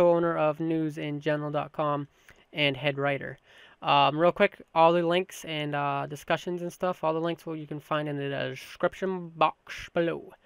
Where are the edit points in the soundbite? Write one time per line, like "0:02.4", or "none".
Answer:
0:09.2